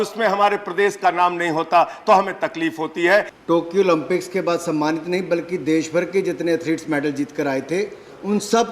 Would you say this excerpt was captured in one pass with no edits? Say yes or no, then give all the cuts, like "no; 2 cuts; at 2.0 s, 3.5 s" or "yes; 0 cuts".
no; 1 cut; at 3.3 s